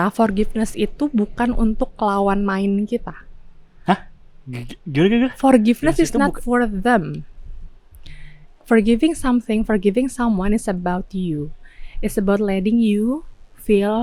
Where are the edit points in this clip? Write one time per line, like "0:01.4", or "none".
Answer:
none